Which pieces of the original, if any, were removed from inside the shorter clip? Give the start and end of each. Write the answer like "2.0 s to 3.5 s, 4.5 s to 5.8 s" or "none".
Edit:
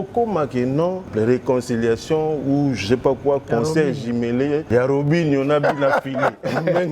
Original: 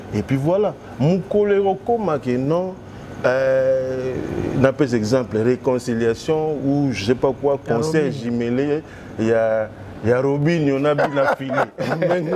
2.8 s to 5.3 s, 8.8 s to 10.0 s